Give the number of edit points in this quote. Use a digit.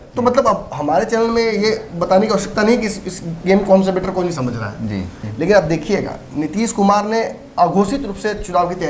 1